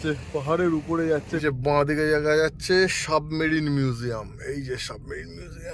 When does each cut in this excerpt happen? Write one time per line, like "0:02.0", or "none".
0:01.3